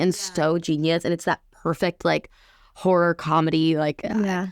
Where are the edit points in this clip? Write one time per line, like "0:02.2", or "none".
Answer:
none